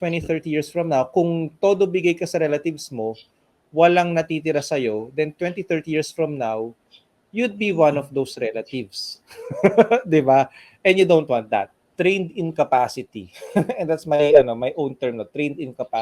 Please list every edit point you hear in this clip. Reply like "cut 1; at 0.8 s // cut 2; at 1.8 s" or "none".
cut 1; at 11.9 s